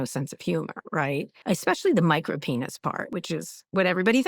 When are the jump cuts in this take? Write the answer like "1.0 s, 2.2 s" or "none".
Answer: 1.3 s, 3.1 s